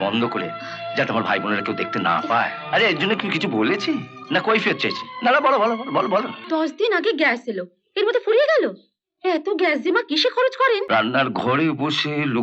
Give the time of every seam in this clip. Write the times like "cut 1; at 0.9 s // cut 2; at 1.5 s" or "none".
cut 1; at 2.6 s // cut 2; at 6.4 s // cut 3; at 10.9 s